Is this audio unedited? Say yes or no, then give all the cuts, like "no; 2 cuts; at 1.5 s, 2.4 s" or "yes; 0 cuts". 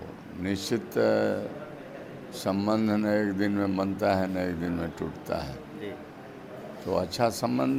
yes; 0 cuts